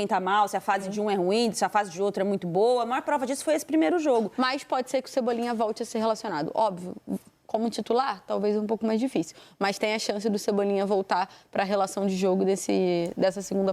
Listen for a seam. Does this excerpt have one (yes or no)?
yes